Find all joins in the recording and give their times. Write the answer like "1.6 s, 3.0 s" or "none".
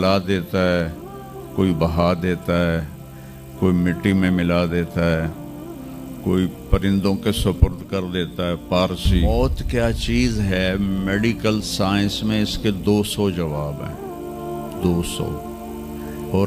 9.2 s